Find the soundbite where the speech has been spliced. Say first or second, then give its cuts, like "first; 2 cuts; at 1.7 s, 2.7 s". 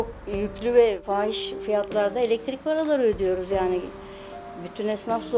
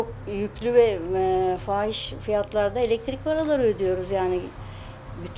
first; 1 cut; at 1.0 s